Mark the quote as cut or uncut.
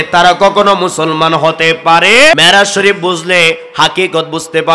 cut